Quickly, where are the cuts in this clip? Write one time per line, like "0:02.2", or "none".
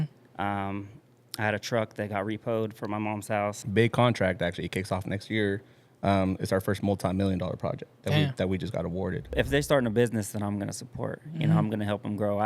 0:03.6
0:09.3